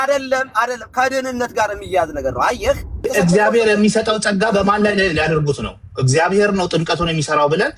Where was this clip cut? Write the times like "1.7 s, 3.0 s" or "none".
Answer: 3.1 s

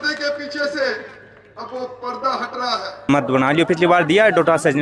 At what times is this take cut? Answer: 3.1 s

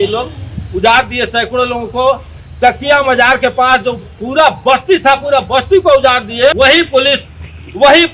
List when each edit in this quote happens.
6.5 s

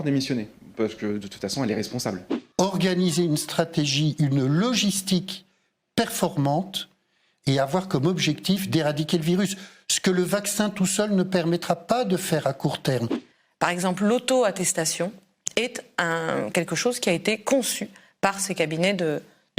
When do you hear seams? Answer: 2.3 s, 13.2 s

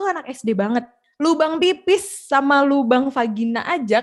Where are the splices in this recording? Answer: 1.0 s

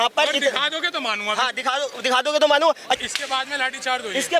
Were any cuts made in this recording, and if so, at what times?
3.0 s

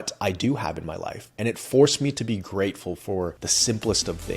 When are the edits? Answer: 3.5 s

